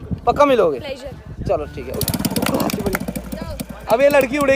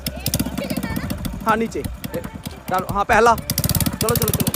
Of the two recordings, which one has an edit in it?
first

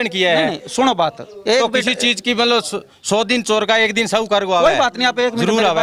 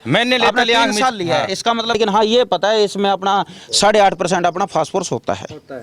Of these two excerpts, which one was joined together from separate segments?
second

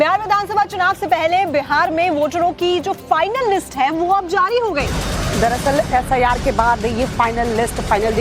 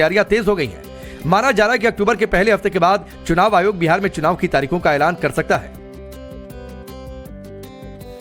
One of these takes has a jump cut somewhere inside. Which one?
first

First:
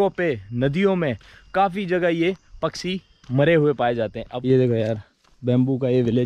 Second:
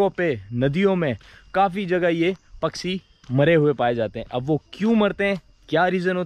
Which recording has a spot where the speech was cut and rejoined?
first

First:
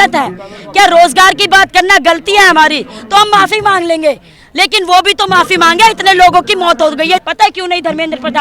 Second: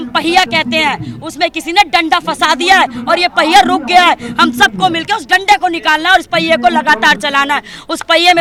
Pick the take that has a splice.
first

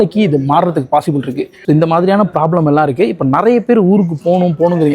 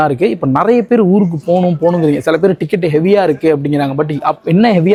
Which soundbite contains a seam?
first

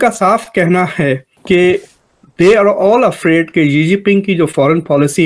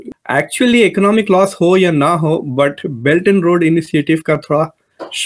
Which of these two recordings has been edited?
first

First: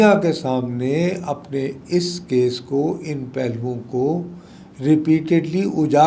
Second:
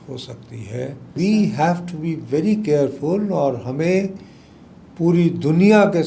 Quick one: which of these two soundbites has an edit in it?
second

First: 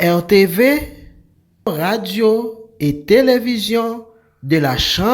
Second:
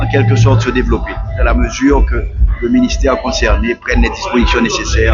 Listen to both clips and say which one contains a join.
first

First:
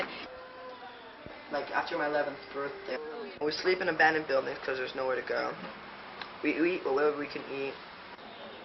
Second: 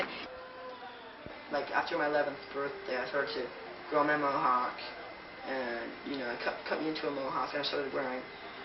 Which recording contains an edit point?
second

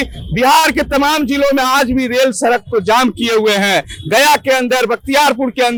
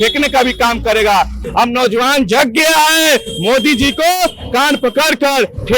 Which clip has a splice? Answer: second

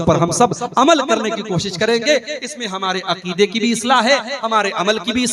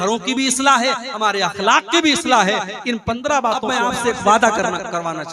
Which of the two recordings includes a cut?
second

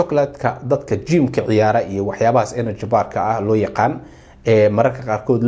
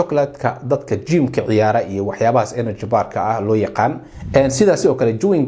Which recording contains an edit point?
second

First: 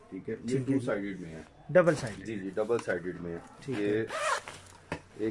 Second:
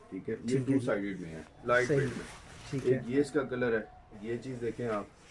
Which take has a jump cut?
second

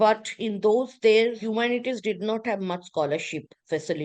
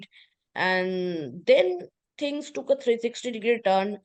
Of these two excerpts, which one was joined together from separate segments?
first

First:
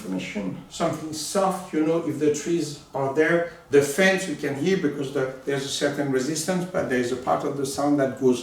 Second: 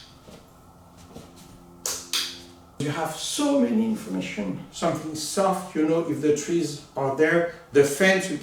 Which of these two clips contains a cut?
second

